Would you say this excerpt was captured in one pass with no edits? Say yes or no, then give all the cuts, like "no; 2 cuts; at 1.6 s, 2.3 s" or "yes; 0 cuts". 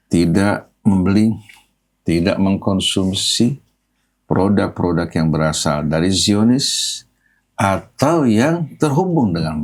yes; 0 cuts